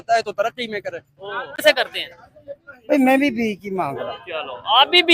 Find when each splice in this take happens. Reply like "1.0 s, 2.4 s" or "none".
1.6 s